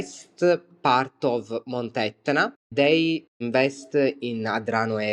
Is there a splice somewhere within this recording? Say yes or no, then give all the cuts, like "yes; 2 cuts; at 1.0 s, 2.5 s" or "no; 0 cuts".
yes; 1 cut; at 3.4 s